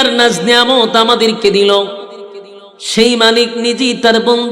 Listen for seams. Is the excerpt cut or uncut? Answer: uncut